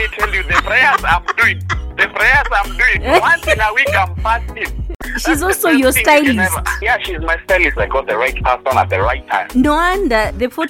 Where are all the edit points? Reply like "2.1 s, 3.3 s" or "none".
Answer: 4.9 s